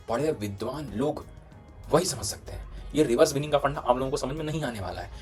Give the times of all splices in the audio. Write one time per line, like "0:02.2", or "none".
none